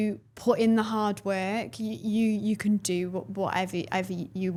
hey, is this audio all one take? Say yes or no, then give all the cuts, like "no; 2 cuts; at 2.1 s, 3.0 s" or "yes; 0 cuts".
yes; 0 cuts